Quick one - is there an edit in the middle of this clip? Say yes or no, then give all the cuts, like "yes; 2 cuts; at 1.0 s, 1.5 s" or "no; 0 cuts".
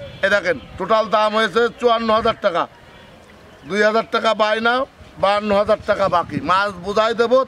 no; 0 cuts